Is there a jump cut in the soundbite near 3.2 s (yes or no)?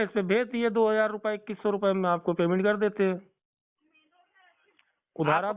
no